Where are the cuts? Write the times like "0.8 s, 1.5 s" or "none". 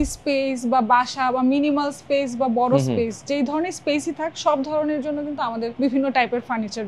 5.7 s